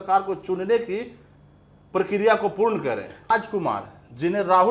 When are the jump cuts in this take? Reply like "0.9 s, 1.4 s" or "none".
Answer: 3.3 s